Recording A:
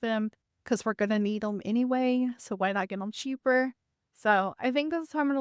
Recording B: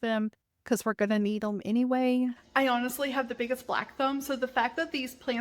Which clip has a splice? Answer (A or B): B